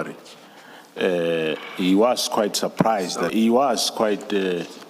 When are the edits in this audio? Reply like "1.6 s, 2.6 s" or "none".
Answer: 3.3 s